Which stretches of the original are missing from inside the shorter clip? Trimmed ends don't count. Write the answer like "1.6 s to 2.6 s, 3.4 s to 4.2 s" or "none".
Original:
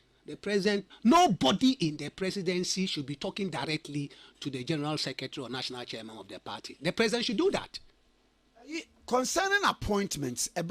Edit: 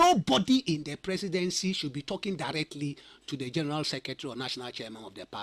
none